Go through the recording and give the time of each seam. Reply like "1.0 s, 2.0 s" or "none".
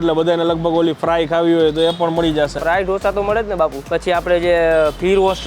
3.8 s

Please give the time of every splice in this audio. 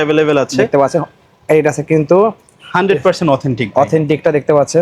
none

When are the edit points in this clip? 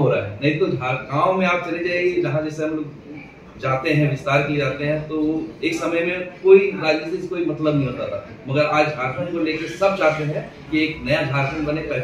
none

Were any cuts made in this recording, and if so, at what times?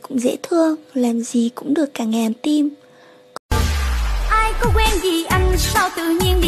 3.4 s

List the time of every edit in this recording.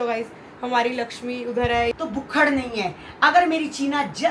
1.9 s

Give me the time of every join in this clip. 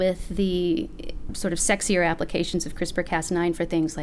none

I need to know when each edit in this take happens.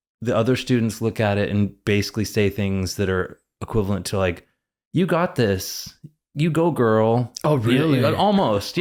none

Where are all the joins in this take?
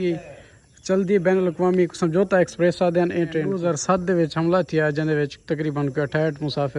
3.5 s

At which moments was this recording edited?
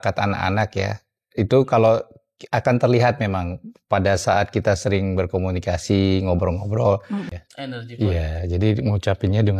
7.3 s

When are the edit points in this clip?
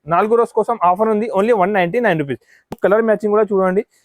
2.7 s

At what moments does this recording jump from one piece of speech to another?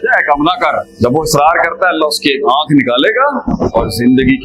0.9 s, 3.5 s

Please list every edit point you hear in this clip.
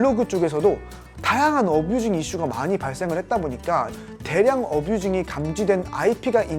3.9 s

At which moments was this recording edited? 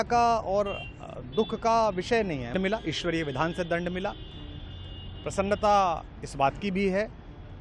2.5 s

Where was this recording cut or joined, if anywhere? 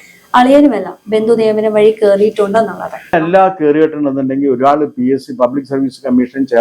3.2 s

